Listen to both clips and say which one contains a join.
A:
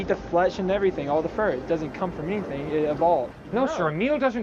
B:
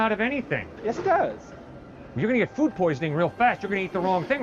A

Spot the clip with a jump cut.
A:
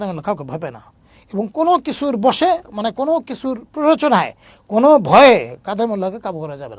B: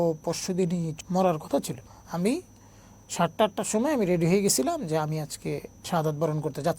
B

